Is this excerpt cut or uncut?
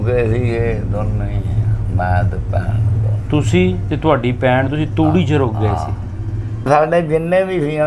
cut